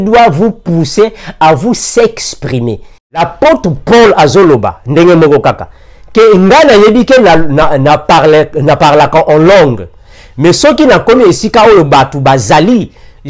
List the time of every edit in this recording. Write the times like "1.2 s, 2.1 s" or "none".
3.2 s